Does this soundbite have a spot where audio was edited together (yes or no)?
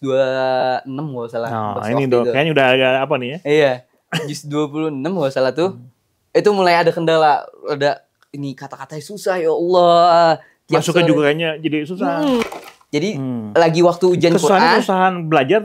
yes